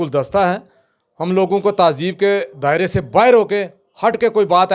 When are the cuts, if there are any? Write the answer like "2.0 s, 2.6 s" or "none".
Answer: none